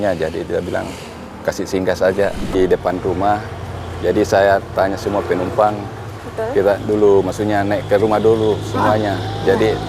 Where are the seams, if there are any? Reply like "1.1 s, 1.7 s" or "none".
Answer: 2.5 s